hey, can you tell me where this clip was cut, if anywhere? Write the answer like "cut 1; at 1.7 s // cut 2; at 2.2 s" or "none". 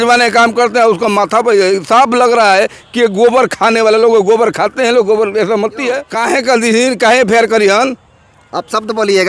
cut 1; at 6.1 s